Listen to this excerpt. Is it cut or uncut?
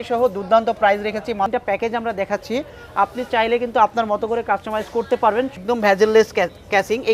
cut